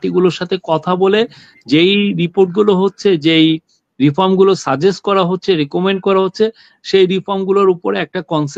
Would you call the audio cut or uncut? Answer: uncut